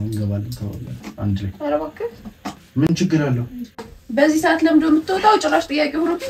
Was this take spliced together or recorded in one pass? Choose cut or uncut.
cut